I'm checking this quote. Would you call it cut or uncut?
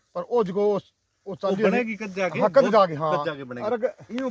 uncut